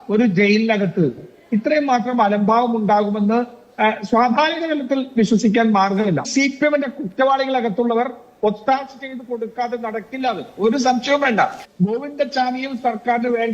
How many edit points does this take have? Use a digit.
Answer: 2